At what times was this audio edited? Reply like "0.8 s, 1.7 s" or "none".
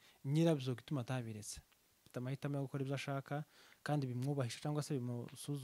2.1 s

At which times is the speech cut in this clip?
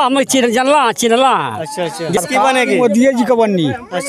2.2 s

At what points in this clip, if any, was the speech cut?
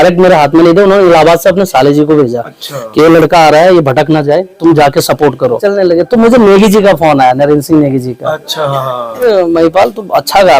5.6 s, 9.2 s

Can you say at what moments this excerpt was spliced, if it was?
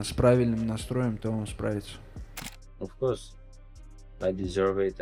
2.4 s

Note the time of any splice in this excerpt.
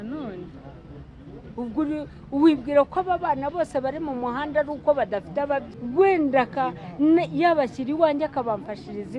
5.7 s

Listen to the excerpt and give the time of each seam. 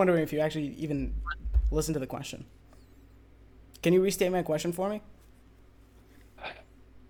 none

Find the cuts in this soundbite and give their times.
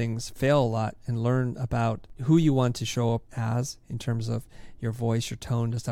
2.1 s, 3.3 s

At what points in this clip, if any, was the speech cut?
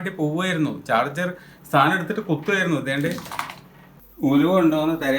3.9 s

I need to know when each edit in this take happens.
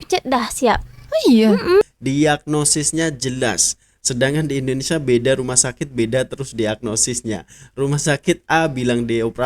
1.8 s

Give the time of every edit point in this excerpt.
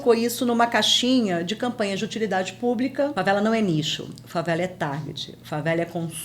3.1 s

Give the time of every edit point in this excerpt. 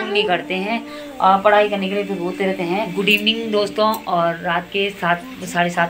2.9 s

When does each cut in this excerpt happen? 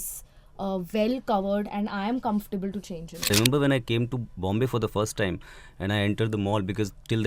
3.3 s

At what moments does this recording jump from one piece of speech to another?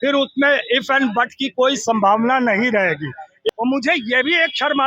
3.5 s

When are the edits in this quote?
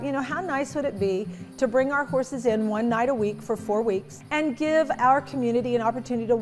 1.4 s, 4.2 s

